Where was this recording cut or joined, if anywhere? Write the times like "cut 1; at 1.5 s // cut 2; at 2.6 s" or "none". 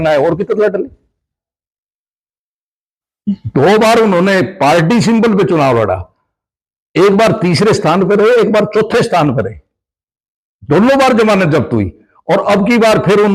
none